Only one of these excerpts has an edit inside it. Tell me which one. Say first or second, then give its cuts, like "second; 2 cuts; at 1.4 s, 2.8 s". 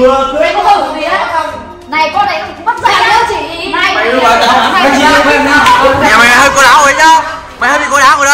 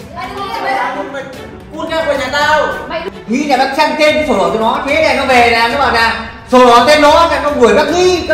second; 1 cut; at 3.0 s